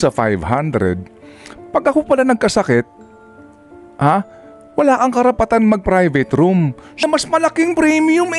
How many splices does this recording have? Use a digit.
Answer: 1